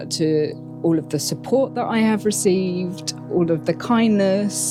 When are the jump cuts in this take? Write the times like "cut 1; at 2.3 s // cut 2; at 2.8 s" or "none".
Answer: none